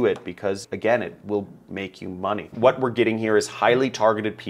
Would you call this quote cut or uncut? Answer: cut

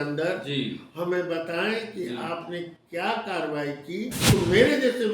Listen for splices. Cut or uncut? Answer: cut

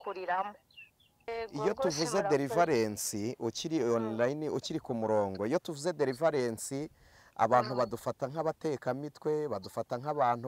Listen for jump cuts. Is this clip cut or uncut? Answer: cut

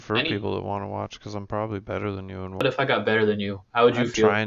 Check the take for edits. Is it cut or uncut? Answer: cut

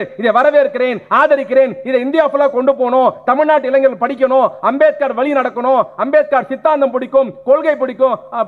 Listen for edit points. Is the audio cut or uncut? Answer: uncut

